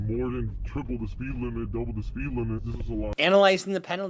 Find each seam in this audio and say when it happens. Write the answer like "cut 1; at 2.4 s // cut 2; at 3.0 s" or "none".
cut 1; at 3.1 s